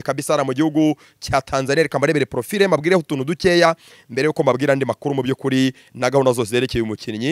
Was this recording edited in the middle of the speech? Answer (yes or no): no